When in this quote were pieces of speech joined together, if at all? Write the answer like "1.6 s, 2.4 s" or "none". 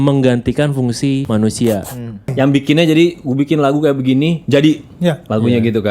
1.2 s, 2.3 s